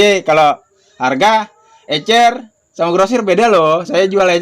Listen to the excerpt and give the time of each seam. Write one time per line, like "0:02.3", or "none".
none